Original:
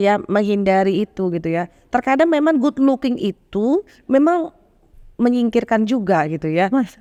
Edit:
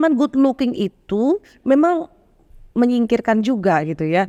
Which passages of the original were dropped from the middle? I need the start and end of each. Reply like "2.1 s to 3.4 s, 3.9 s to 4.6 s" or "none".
none